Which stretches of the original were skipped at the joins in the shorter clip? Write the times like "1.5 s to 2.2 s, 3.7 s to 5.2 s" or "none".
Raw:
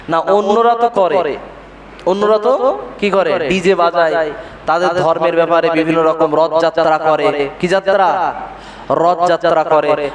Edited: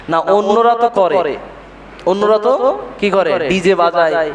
none